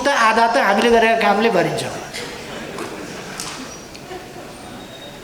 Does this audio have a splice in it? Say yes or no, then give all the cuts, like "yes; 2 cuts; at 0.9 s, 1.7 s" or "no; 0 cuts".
no; 0 cuts